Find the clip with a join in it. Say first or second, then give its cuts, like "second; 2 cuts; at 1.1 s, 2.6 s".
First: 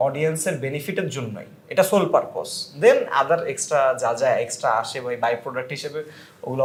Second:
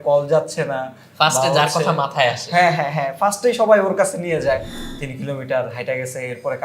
second; 1 cut; at 4.8 s